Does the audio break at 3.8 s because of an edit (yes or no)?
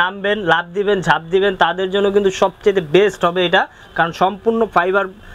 no